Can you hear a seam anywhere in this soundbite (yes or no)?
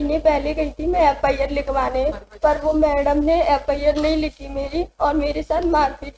no